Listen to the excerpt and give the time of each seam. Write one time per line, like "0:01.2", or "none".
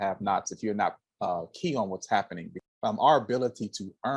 0:02.5